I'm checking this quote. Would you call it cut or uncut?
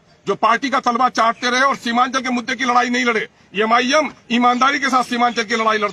uncut